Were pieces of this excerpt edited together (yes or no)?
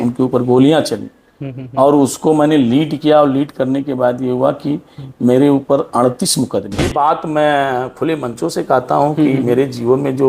yes